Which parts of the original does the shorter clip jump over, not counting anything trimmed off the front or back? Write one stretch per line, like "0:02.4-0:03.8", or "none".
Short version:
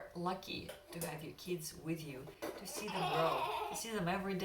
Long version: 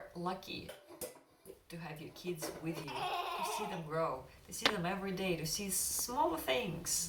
0:01.0-0:01.8